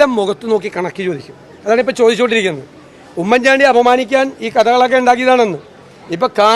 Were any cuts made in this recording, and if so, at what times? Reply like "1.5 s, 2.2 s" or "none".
none